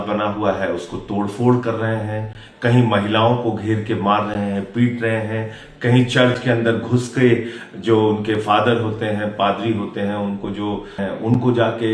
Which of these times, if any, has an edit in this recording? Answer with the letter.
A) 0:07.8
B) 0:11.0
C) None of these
B